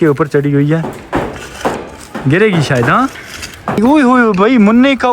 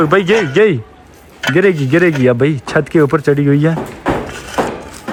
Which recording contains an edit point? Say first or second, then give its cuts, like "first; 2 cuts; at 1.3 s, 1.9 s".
first; 1 cut; at 3.8 s